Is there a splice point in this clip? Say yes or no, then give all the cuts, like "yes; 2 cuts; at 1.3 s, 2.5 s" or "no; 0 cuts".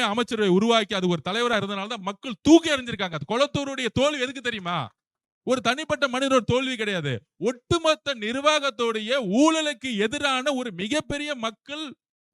no; 0 cuts